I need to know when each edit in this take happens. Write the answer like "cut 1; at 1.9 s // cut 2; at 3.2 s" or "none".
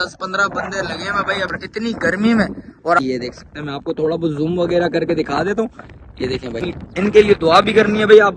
cut 1; at 1.5 s // cut 2; at 3.0 s // cut 3; at 6.8 s